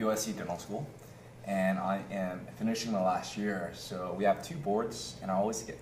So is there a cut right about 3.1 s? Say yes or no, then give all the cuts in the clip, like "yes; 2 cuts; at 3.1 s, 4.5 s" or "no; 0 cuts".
yes; 1 cut; at 3.1 s